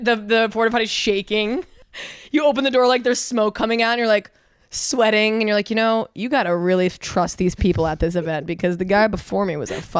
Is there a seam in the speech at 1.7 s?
yes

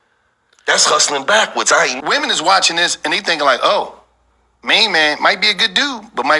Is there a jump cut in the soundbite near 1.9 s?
yes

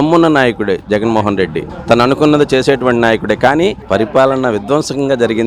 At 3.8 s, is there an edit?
yes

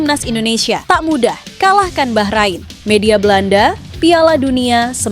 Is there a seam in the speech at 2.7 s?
yes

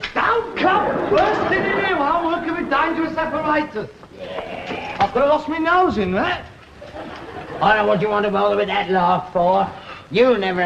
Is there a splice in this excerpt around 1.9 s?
yes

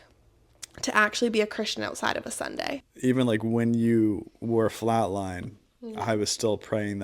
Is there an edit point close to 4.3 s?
no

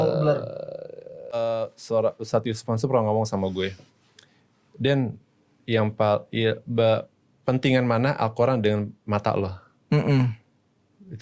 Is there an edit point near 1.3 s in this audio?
yes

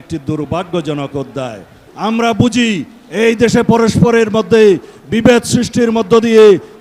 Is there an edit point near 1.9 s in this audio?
yes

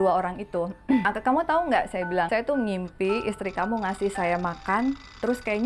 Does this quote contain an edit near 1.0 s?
yes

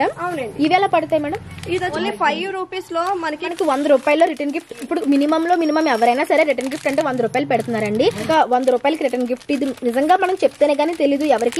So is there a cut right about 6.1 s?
no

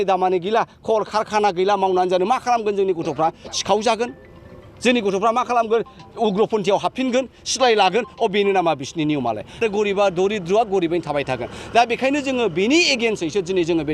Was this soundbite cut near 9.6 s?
yes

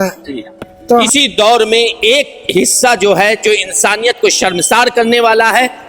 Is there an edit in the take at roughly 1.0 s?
yes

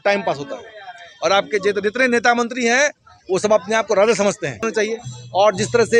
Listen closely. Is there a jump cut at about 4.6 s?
yes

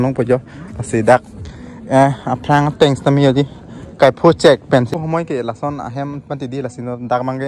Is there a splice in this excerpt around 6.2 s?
no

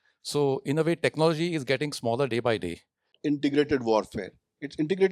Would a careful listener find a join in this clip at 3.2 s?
yes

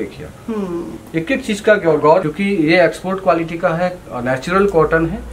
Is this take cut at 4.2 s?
no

